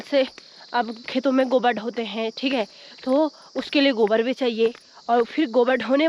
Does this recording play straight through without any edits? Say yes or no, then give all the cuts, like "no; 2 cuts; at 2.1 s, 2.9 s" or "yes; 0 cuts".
yes; 0 cuts